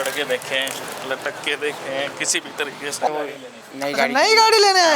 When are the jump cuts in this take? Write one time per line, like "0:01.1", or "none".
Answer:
0:03.1

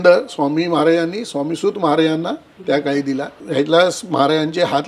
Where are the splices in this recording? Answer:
0:02.5

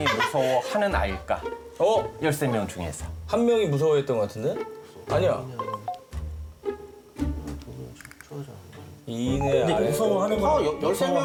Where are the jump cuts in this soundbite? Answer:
none

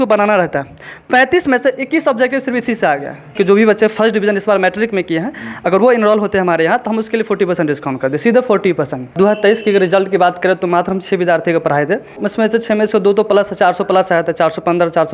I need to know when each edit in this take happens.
0:03.3
0:09.2
0:12.2

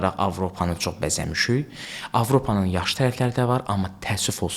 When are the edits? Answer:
none

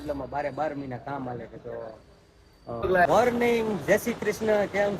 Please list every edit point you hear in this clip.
0:03.0

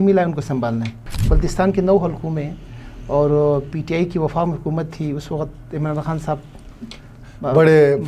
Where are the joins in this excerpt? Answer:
0:01.0

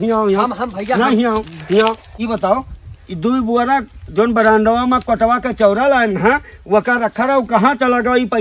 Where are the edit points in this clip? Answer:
0:02.1

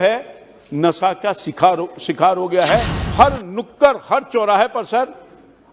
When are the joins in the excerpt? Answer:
0:03.0

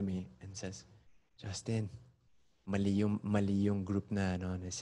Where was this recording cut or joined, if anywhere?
none

